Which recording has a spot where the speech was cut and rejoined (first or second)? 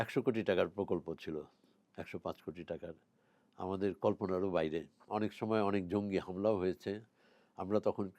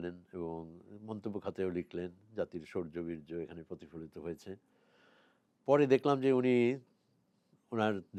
first